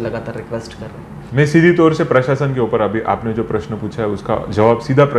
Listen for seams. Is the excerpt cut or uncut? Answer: cut